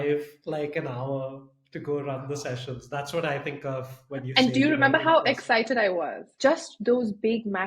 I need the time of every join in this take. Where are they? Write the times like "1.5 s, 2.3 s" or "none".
6.2 s

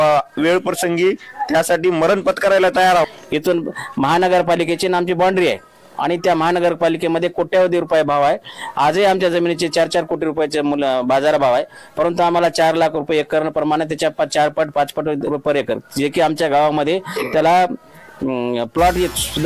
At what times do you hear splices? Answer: 3.1 s, 15.3 s

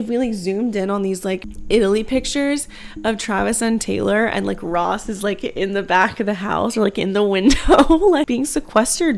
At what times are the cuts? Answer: 1.5 s, 8.3 s

